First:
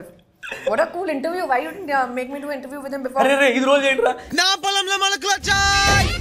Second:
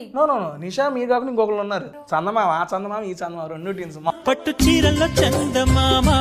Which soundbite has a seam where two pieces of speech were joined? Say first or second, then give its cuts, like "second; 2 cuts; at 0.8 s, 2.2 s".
second; 2 cuts; at 1.9 s, 4.1 s